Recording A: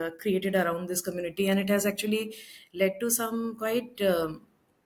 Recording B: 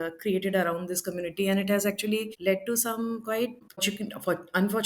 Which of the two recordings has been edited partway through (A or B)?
B